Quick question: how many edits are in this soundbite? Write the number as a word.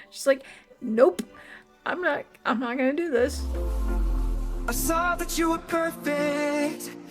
one